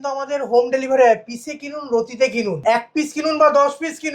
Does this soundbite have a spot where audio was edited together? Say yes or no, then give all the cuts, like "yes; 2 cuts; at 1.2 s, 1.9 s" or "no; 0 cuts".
yes; 1 cut; at 2.6 s